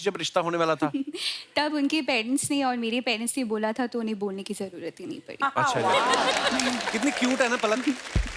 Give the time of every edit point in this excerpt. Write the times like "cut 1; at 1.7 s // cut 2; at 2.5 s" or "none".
none